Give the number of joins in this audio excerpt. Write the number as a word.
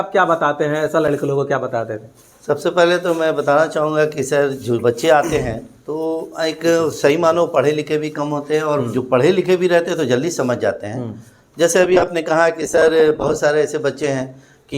zero